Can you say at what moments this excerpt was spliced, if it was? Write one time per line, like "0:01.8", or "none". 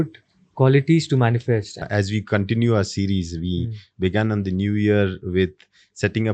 0:01.8

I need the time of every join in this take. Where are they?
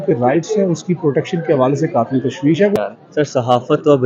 0:02.8

